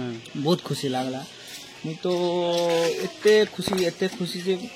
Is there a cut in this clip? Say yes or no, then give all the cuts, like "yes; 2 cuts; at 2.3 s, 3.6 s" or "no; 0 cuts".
no; 0 cuts